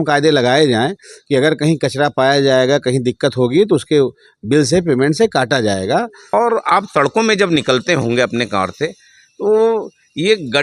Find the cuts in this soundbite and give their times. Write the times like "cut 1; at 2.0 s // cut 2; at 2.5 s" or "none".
cut 1; at 6.3 s